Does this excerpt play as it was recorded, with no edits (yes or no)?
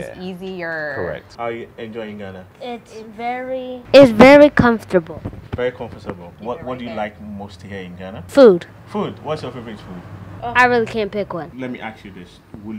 no